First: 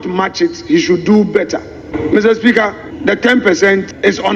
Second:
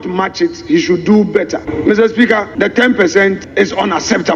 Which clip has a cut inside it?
second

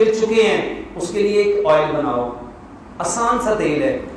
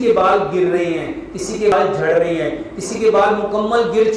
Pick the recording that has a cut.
second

